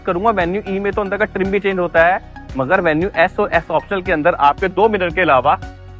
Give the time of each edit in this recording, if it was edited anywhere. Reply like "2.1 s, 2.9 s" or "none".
none